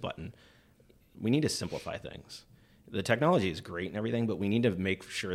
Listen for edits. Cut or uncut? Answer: cut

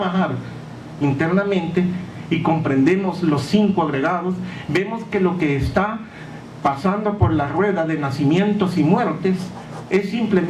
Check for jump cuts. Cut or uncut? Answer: uncut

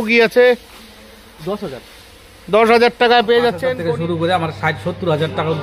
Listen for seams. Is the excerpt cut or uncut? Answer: cut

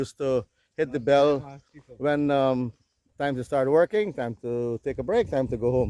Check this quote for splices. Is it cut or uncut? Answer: uncut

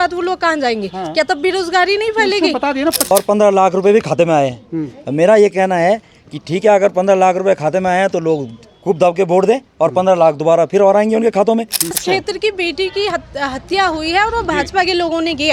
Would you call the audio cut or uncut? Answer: cut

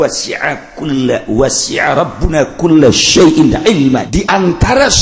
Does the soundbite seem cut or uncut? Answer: cut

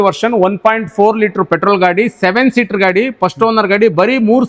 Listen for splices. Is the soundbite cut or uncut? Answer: uncut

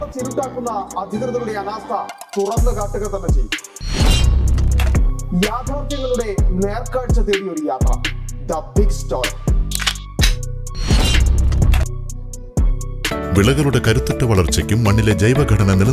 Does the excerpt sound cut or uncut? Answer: cut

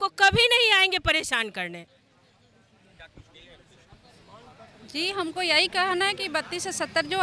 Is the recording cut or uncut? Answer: uncut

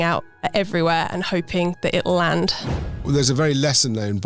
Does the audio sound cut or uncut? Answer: cut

